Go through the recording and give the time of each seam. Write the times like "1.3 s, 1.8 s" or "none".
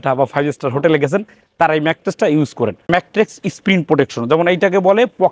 2.9 s